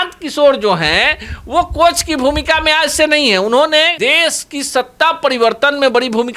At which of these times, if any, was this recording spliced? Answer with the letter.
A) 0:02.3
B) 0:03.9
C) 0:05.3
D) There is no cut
B